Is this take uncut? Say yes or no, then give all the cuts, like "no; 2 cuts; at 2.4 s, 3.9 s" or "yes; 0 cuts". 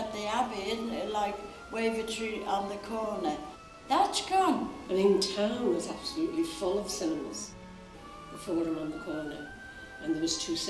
no; 1 cut; at 4.7 s